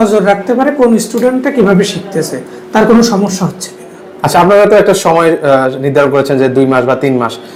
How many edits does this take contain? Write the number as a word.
zero